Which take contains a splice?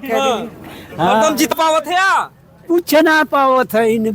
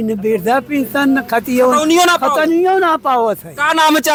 first; 1 cut; at 1.5 s

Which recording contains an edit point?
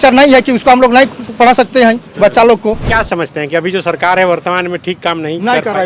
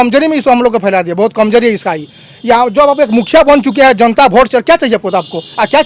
first; 1 cut; at 2.8 s

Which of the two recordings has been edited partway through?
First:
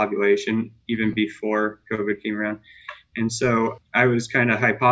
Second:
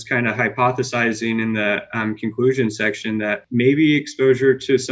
second; 1 cut; at 3.4 s

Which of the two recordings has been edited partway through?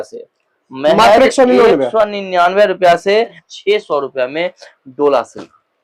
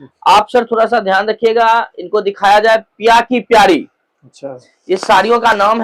first; 1 cut; at 3.4 s

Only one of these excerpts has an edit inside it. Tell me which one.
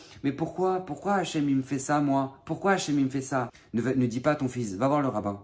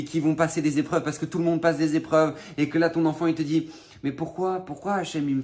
first; 1 cut; at 3.6 s

